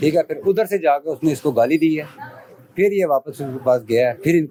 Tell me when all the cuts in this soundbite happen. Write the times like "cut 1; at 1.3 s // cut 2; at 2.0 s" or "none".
none

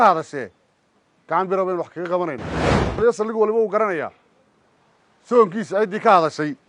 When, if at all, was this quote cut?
cut 1; at 2.9 s

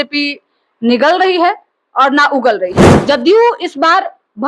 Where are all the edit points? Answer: cut 1; at 2.9 s

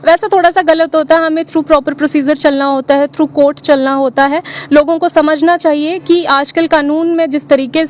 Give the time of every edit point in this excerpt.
none

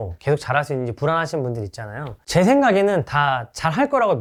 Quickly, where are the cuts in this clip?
none

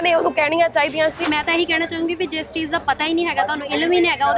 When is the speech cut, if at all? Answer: cut 1; at 1.2 s

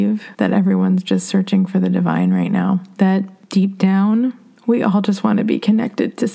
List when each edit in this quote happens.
none

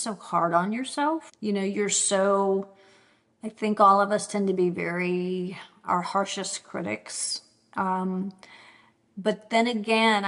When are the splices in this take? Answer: cut 1; at 1.3 s

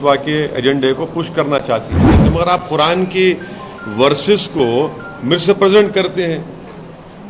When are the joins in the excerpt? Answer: cut 1; at 2.2 s

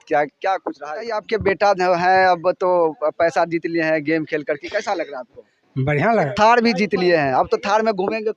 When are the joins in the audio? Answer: cut 1; at 1.2 s // cut 2; at 6.3 s

